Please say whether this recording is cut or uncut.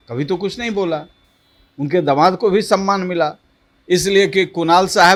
uncut